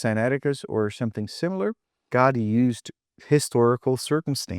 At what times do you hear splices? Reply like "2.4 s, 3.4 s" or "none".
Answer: 2.1 s